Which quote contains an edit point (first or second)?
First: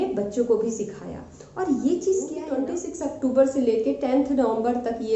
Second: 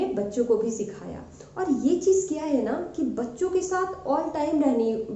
first